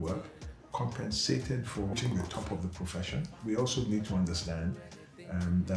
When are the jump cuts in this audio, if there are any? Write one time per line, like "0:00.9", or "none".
0:01.9
0:03.4